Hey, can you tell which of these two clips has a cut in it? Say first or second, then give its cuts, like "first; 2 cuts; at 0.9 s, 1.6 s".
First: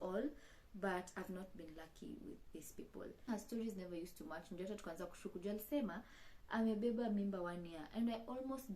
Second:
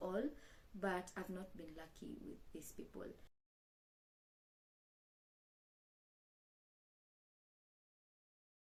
first; 1 cut; at 3.3 s